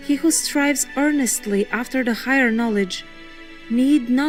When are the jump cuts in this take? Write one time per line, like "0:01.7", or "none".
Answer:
none